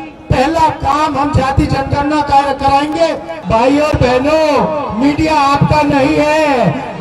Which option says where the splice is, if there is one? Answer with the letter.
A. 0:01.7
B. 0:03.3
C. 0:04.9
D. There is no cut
B